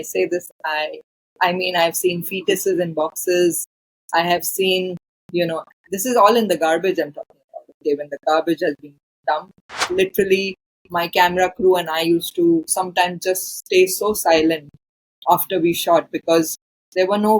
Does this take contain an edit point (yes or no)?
yes